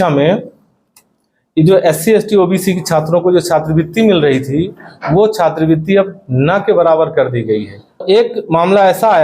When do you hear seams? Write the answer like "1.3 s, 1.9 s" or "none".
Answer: 8.0 s